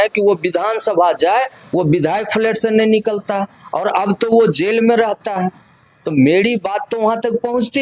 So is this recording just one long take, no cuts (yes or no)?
yes